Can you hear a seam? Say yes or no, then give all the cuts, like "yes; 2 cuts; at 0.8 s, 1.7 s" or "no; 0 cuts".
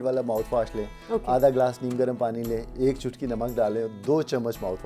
no; 0 cuts